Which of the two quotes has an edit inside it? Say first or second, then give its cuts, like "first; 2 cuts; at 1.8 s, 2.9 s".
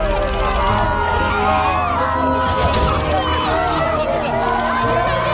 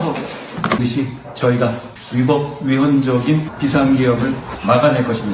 second; 1 cut; at 1.2 s